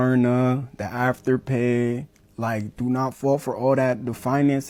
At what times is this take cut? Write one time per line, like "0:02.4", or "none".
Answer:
none